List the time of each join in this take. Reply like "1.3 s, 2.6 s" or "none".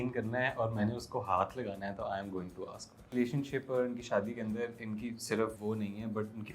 3.1 s, 5.6 s